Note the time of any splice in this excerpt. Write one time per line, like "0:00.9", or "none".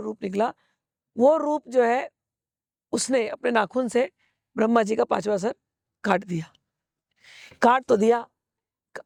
none